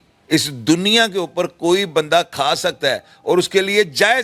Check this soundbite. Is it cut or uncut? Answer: uncut